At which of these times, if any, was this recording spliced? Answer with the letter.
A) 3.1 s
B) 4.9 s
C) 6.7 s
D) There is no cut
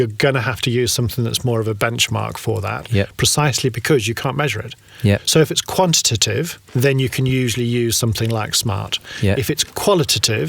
C